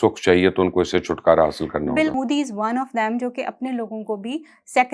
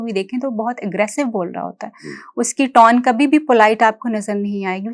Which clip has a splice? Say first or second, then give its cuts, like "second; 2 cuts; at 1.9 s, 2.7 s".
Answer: first; 1 cut; at 2.2 s